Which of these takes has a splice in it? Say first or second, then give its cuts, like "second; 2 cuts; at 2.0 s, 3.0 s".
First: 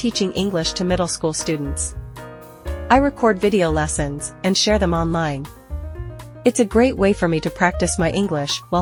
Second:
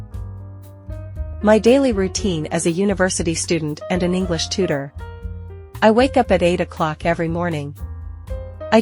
second; 1 cut; at 1.4 s